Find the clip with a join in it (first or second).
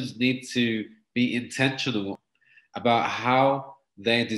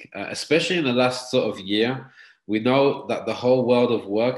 first